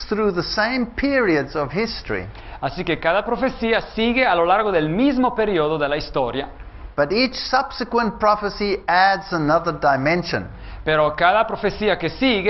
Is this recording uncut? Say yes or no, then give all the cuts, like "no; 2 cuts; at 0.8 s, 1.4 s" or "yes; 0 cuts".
no; 1 cut; at 4.6 s